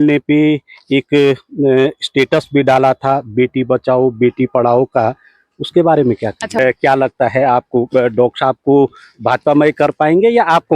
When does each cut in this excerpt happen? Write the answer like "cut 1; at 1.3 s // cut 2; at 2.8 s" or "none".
cut 1; at 6.6 s